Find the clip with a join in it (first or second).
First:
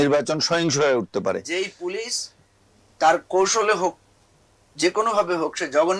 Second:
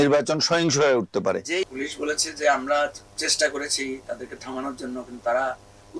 second